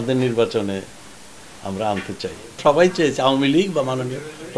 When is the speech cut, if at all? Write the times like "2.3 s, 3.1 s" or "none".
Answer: 2.6 s